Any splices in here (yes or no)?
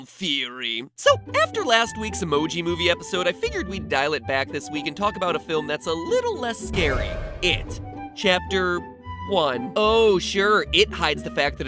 no